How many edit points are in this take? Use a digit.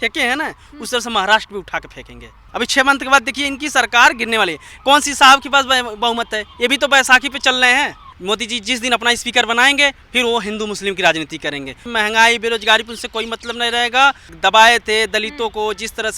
4